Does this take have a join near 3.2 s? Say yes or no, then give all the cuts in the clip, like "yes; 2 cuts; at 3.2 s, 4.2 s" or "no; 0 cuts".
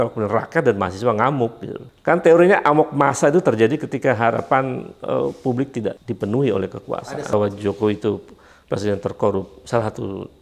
no; 3 cuts; at 1.8 s, 6.1 s, 7.3 s